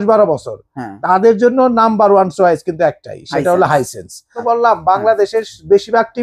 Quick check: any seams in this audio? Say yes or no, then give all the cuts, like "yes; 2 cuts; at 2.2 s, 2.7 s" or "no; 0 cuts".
yes; 1 cut; at 4.4 s